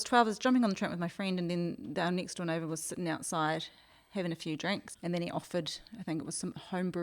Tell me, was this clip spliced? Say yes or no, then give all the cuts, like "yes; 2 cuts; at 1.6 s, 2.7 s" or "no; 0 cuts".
yes; 1 cut; at 4.9 s